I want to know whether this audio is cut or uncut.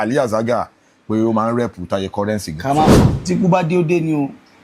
cut